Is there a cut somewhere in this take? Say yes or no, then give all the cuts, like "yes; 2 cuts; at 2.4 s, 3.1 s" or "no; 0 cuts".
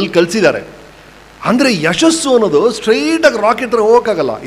no; 0 cuts